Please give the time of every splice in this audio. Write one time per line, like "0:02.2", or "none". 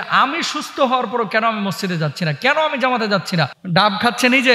0:03.6